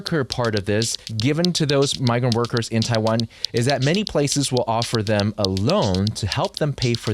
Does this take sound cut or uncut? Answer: cut